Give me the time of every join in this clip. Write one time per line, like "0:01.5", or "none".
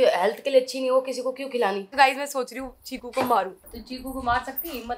0:01.9
0:03.6